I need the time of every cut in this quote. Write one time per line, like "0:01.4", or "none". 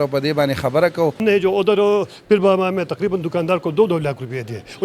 0:01.2